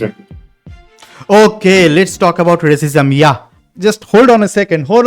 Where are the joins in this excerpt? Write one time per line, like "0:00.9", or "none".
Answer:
0:03.6